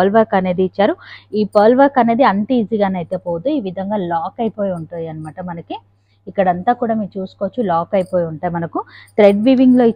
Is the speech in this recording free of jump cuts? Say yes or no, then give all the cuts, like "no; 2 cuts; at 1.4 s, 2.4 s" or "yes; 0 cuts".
yes; 0 cuts